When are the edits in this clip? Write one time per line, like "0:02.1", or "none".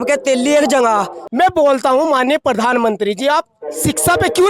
0:01.2